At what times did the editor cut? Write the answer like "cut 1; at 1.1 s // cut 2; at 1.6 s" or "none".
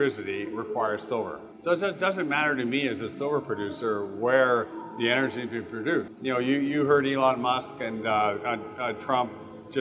cut 1; at 1.5 s // cut 2; at 6.1 s